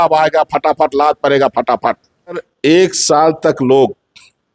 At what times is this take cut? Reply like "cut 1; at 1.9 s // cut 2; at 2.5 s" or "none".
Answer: cut 1; at 2.4 s